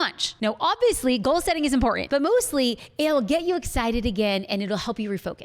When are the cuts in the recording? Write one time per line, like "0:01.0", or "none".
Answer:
0:02.0

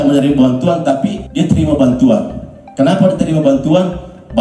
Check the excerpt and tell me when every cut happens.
0:01.2

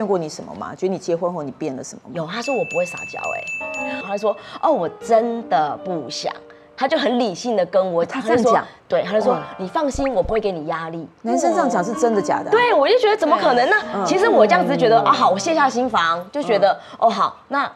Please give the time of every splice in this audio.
0:04.1

